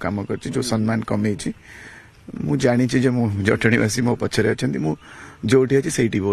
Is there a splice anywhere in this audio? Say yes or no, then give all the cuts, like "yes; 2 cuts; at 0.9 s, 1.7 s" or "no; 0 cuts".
yes; 1 cut; at 1.1 s